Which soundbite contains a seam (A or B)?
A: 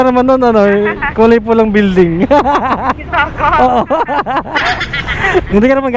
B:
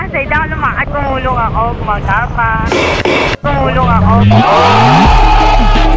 A